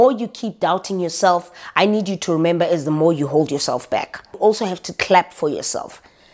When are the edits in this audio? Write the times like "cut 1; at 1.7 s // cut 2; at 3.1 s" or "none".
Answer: cut 1; at 4.2 s

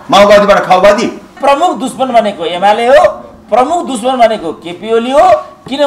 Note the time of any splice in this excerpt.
cut 1; at 1.4 s

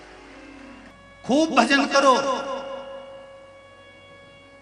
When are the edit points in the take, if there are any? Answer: cut 1; at 1.4 s

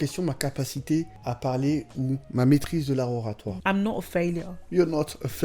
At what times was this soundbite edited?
cut 1; at 1.1 s // cut 2; at 2.2 s // cut 3; at 3.5 s

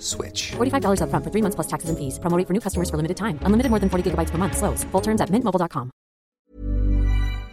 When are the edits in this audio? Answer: cut 1; at 6.3 s

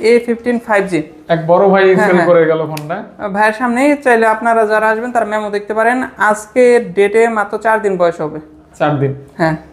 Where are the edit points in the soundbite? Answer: none

